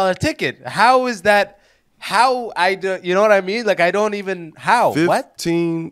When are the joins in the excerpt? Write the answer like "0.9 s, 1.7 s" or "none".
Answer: none